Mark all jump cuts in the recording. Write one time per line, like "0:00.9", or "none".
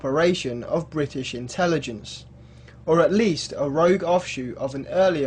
0:03.7